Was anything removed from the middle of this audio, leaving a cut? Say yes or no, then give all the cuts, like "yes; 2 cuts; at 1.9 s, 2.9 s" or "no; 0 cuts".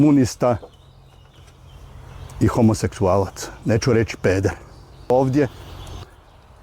yes; 1 cut; at 5.1 s